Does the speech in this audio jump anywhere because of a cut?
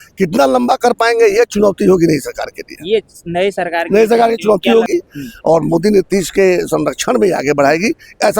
yes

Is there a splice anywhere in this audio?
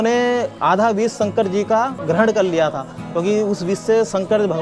yes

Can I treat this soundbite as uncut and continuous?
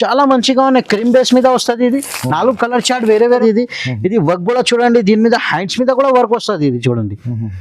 no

